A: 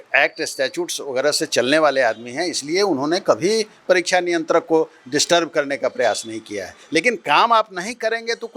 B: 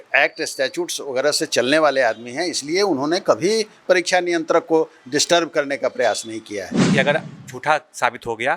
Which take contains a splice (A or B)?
B